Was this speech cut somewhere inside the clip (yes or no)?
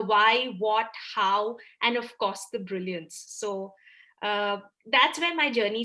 no